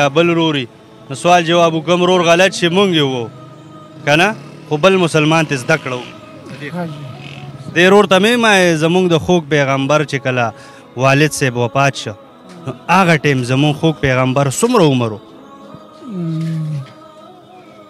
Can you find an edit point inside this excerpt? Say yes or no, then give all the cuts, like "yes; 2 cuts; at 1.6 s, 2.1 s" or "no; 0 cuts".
yes; 1 cut; at 16.9 s